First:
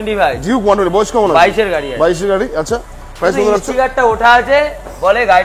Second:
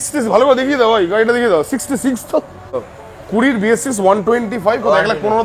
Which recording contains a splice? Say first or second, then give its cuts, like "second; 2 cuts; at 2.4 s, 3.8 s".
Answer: second; 1 cut; at 2.9 s